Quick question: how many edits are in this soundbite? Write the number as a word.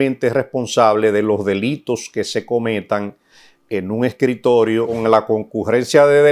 one